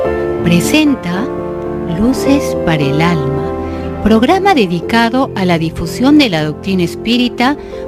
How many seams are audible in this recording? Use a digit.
0